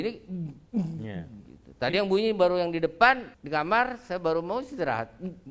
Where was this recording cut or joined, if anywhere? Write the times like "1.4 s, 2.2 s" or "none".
3.3 s